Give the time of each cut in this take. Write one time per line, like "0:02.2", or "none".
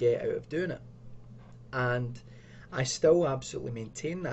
none